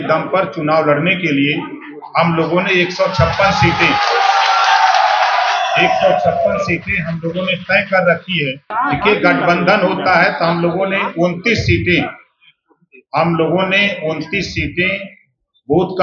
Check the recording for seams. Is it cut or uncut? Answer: cut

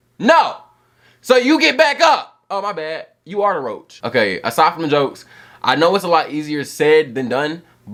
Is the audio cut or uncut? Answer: uncut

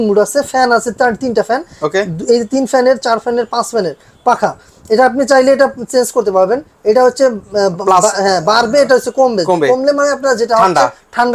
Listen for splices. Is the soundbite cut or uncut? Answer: uncut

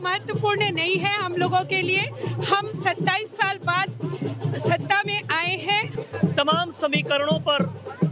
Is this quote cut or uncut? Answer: cut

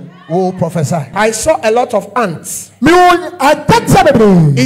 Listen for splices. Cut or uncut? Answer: cut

